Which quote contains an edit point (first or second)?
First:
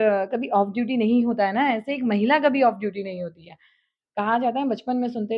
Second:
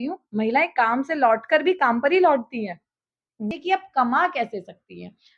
second